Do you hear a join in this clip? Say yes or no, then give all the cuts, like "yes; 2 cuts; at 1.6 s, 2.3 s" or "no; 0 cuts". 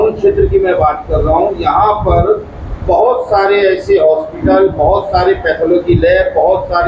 no; 0 cuts